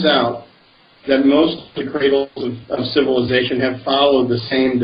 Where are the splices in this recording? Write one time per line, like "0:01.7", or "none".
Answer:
0:03.4